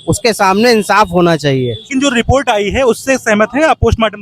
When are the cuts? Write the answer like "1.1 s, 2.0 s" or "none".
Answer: 1.8 s